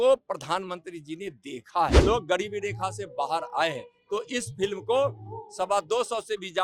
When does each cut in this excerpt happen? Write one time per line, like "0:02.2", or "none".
0:02.0